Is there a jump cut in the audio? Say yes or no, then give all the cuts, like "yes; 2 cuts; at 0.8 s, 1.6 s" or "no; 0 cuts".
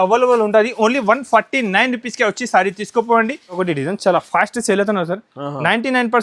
yes; 1 cut; at 3.6 s